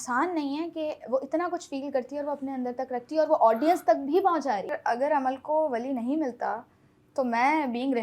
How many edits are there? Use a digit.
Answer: 1